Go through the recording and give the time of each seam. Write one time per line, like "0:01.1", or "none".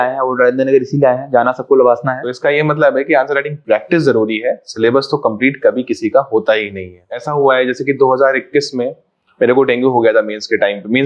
0:02.3
0:07.3